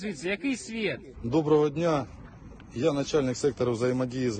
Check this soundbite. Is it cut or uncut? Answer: cut